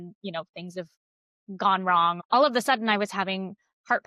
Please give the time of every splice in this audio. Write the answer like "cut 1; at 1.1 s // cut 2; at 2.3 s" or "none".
cut 1; at 2.2 s